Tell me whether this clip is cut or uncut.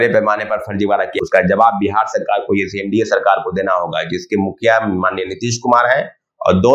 cut